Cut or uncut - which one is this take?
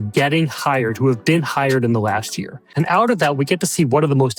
cut